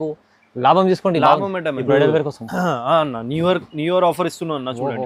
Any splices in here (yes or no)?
yes